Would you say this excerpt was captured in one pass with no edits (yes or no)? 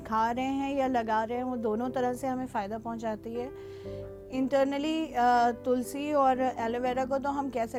yes